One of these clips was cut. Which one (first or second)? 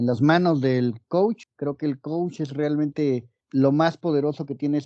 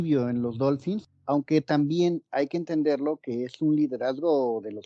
first